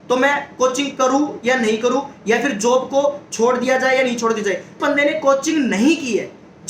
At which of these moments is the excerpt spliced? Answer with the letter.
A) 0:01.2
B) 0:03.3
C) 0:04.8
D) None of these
C